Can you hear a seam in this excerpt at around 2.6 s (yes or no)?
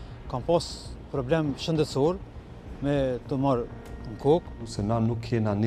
no